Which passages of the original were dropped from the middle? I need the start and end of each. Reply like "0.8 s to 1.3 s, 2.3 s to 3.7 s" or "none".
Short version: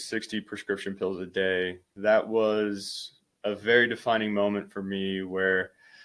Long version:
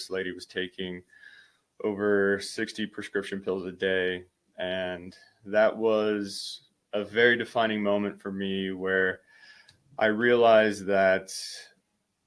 4.3 s to 5.3 s